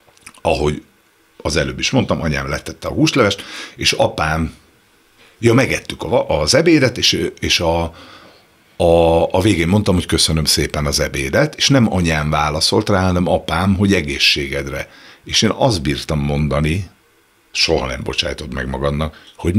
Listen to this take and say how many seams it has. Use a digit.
0